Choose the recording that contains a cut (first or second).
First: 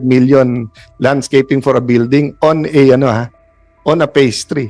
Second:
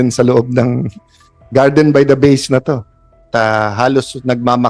second